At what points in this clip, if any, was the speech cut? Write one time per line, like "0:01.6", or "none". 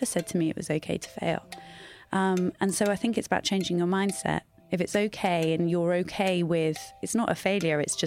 none